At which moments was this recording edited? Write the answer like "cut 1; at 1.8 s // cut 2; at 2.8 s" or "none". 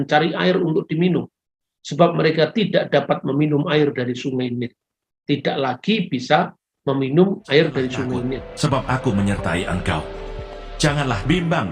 cut 1; at 8.5 s